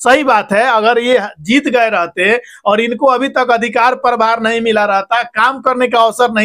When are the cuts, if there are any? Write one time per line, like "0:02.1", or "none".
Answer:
none